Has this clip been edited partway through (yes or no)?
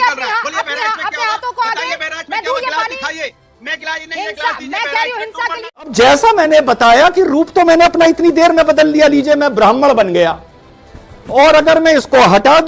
yes